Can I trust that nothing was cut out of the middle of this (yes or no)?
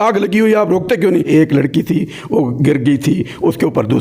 no